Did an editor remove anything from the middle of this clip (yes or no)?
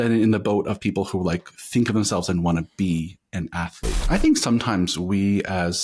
yes